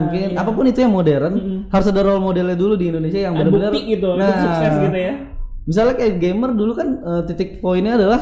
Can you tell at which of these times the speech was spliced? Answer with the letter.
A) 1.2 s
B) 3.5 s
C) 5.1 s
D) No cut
D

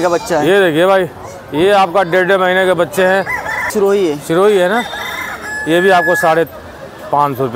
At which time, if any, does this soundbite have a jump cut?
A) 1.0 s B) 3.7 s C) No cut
B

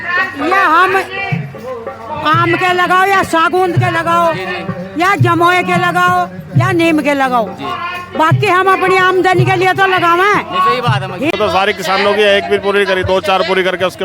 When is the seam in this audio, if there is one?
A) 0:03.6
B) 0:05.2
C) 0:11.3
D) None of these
C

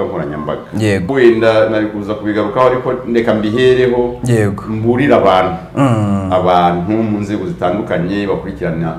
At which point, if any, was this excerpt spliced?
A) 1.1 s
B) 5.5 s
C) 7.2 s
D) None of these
A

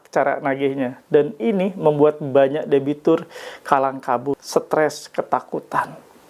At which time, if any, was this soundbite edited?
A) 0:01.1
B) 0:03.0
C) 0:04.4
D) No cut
C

